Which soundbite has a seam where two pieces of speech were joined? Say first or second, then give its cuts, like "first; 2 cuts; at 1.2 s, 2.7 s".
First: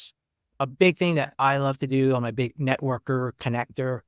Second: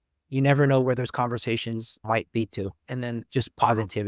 second; 1 cut; at 2.9 s